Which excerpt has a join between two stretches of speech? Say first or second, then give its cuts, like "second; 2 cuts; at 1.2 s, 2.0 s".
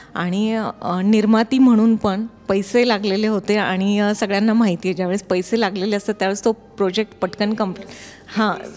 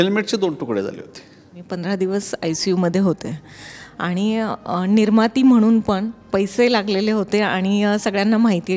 second; 1 cut; at 1.6 s